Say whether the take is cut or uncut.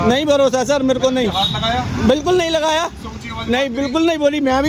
uncut